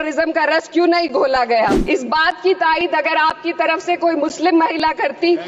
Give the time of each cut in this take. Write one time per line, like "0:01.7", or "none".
0:01.8